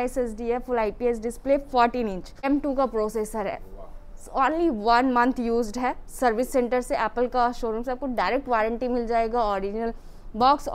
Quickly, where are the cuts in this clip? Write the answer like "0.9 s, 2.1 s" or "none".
2.4 s